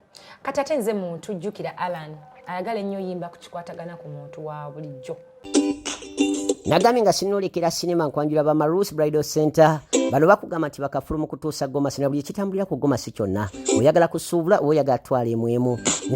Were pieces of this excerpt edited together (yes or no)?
yes